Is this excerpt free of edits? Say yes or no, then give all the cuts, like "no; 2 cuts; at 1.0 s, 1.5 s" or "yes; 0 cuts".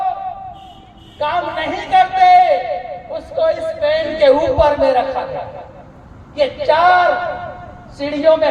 yes; 0 cuts